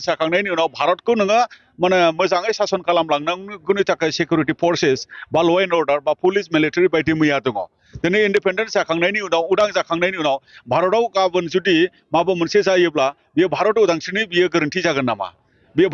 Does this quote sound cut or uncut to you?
uncut